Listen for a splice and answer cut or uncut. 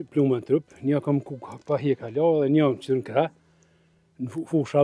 uncut